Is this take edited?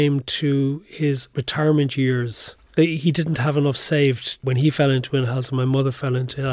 yes; 3 cuts; at 1.3 s, 2.7 s, 4.4 s

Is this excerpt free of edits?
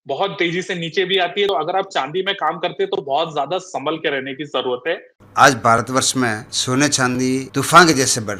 no; 4 cuts; at 1.5 s, 5.1 s, 6.5 s, 7.5 s

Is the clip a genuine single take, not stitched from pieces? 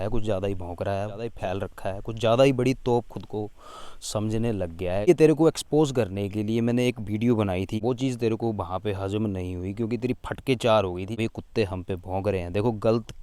no; 4 cuts; at 1.3 s, 5.1 s, 7.8 s, 11.1 s

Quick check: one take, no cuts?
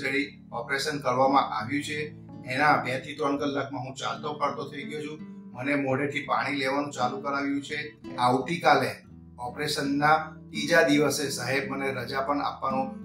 no; 1 cut; at 8.1 s

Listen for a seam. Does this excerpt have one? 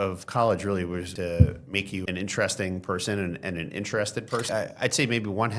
yes; 3 cuts; at 1.1 s, 2.0 s, 4.4 s

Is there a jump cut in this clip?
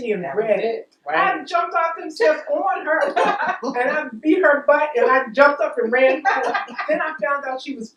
no; 0 cuts

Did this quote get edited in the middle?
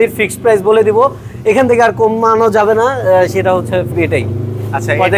yes; 1 cut; at 3.9 s

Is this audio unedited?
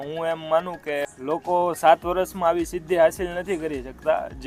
yes; 0 cuts

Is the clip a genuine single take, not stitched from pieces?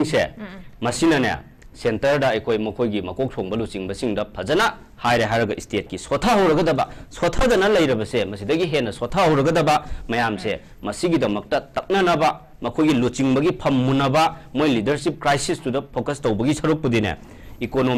yes; 0 cuts

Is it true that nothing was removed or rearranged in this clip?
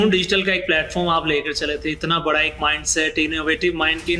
yes; 0 cuts

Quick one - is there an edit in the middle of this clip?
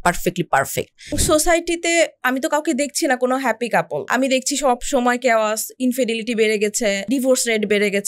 yes; 3 cuts; at 1.2 s, 4.1 s, 7.1 s

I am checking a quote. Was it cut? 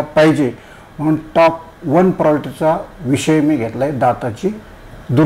no; 0 cuts

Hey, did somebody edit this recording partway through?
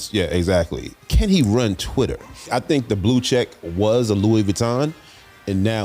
yes; 2 cuts; at 0.9 s, 2.5 s

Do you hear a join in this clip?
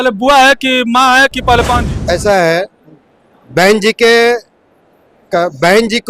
yes; 1 cut; at 1.9 s

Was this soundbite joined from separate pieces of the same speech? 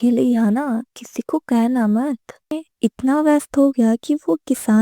yes; 1 cut; at 2.6 s

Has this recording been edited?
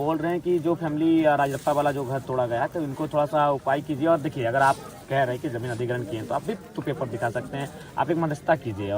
no; 0 cuts

